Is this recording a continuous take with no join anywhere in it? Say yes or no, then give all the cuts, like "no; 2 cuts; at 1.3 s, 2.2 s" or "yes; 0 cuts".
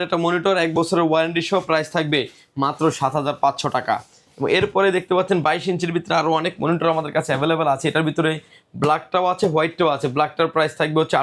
yes; 0 cuts